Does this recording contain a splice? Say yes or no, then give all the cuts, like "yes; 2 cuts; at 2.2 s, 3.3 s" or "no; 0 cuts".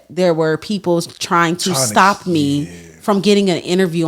no; 0 cuts